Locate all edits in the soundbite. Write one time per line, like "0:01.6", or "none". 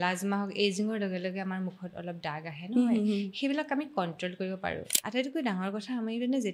0:04.9